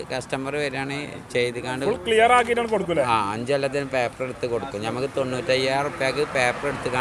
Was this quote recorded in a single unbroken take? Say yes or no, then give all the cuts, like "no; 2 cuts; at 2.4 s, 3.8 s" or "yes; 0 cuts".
yes; 0 cuts